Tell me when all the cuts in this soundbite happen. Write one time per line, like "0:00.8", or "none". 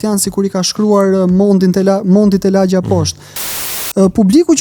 0:03.5